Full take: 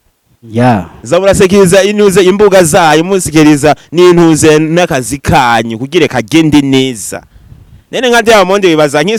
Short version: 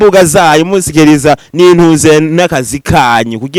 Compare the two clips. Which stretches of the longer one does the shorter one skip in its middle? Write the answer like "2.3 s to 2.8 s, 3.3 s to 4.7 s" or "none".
none